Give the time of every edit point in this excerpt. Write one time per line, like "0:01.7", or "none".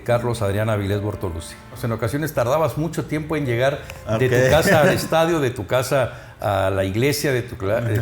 0:01.8